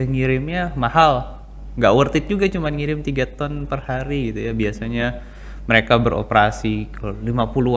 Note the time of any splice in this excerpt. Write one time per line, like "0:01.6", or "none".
none